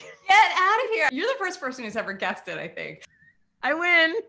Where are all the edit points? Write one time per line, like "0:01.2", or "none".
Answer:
0:01.1
0:03.0